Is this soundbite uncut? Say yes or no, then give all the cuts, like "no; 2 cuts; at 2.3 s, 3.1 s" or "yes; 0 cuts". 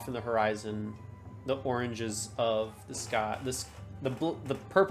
yes; 0 cuts